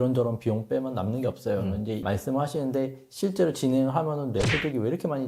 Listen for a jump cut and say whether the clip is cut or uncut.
cut